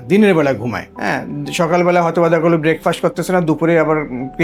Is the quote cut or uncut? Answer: uncut